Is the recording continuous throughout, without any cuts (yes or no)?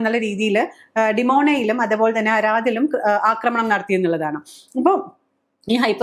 yes